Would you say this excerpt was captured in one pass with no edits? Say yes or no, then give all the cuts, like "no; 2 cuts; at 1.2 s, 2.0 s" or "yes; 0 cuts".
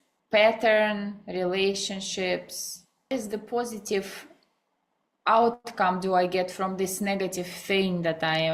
no; 1 cut; at 3.1 s